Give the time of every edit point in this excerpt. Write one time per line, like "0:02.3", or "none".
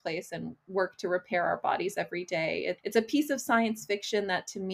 0:02.8